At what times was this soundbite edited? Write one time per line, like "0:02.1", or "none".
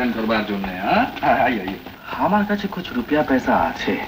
0:01.8